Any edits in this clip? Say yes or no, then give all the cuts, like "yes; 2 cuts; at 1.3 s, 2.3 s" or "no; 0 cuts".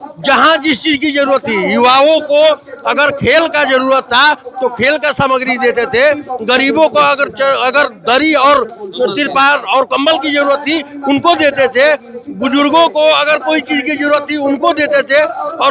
no; 0 cuts